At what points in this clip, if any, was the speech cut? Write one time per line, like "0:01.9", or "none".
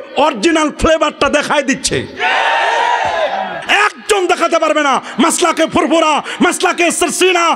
0:03.6